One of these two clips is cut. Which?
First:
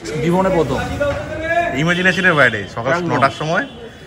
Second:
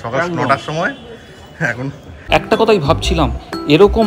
second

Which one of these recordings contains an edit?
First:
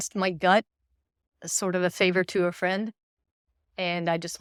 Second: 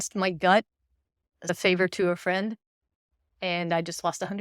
second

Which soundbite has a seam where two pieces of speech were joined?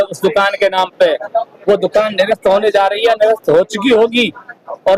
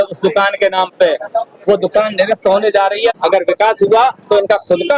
second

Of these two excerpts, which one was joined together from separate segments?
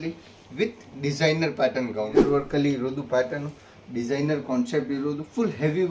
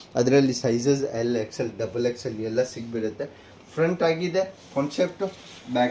first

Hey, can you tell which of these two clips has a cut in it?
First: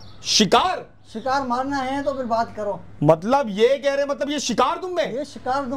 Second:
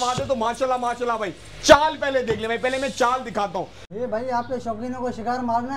second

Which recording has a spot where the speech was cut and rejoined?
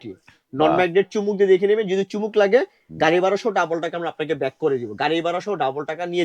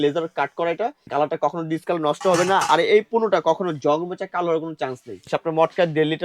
second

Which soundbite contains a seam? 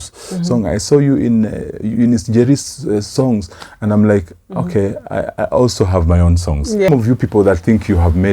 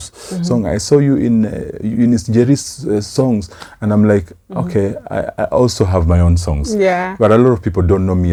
first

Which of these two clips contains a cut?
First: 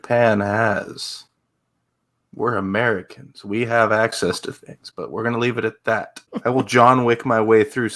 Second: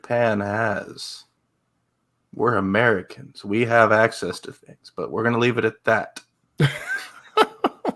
first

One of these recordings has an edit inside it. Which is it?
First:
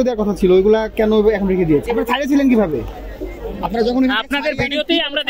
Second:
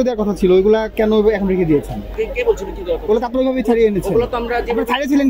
first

